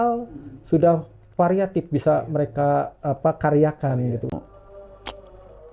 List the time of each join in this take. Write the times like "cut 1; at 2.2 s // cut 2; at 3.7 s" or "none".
cut 1; at 4.3 s